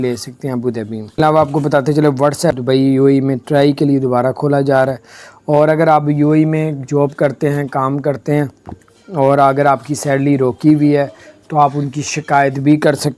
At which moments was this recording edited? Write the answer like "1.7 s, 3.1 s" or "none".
1.2 s, 2.6 s